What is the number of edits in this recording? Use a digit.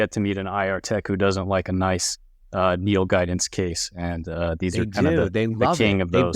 0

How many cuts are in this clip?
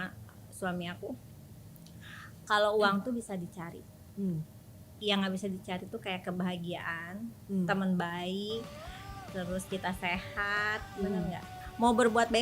1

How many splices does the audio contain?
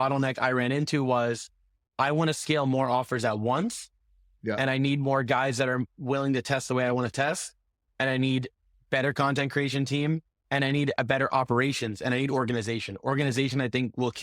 0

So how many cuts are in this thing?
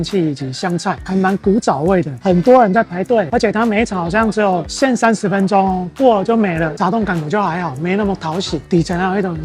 1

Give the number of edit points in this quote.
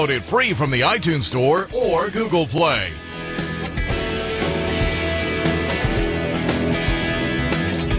1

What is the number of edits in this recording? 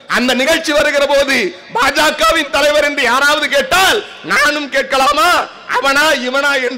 0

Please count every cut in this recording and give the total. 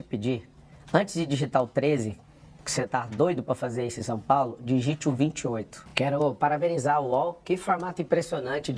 1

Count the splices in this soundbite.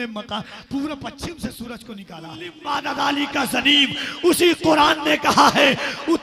1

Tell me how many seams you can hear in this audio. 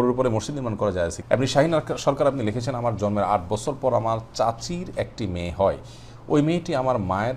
1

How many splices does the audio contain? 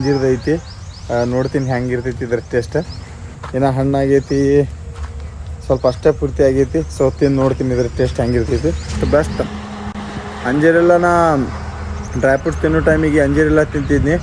0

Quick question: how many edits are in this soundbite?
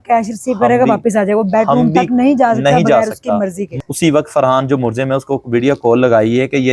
1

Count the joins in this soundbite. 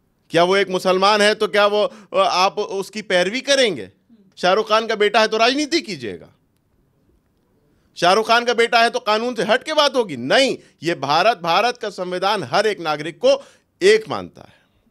1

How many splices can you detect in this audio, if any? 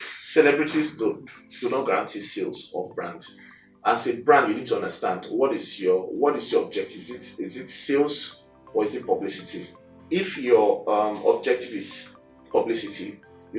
0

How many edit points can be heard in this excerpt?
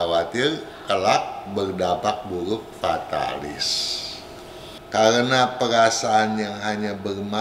1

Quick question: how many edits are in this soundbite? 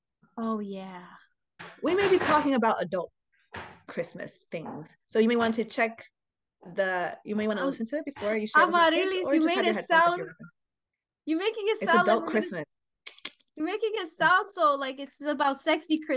1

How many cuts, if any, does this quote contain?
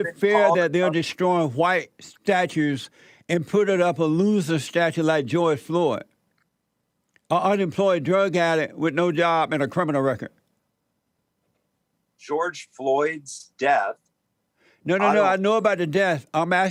0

